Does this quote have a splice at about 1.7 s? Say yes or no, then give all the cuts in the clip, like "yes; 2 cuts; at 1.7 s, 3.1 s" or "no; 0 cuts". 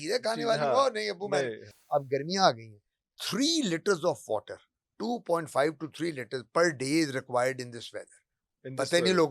yes; 1 cut; at 1.7 s